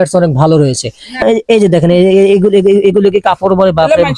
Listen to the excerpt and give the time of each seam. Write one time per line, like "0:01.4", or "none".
0:01.2

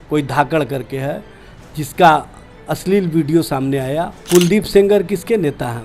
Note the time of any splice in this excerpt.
0:04.2

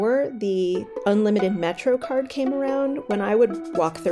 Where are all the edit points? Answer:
0:00.9

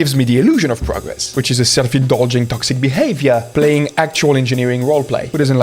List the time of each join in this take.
0:03.5

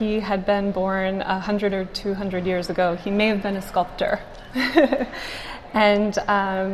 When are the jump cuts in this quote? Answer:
none

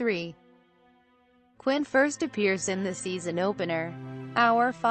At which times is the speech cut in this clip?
0:01.8

